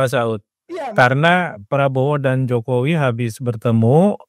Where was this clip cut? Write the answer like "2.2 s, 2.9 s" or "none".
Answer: none

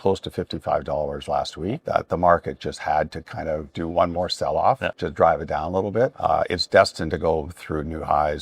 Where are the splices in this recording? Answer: 1.8 s, 5.0 s, 6.2 s

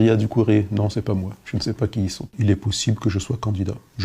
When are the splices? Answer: 2.3 s

